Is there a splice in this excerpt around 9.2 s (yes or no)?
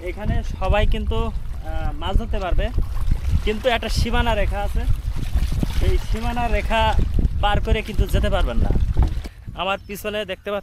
yes